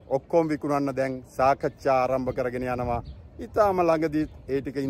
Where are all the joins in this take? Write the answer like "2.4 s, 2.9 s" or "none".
none